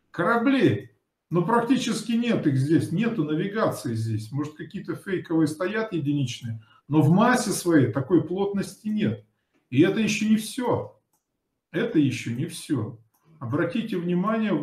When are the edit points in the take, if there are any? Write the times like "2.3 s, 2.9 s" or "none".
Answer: none